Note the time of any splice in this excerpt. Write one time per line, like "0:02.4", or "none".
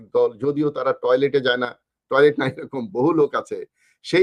none